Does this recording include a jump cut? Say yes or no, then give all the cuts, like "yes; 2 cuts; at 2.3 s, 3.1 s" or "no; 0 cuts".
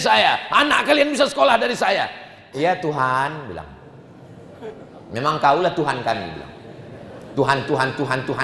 no; 0 cuts